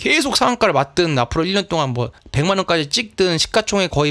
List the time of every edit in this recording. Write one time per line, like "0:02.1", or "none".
0:02.2